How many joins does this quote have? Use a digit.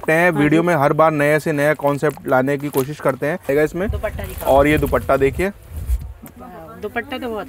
1